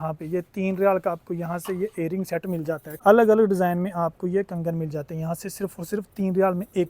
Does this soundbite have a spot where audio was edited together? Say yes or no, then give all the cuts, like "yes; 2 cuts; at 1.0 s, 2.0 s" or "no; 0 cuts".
yes; 1 cut; at 2.9 s